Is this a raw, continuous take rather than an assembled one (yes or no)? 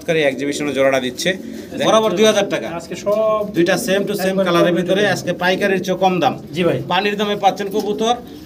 no